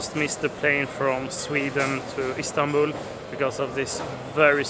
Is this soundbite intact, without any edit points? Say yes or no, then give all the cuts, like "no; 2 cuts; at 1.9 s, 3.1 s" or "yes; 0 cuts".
yes; 0 cuts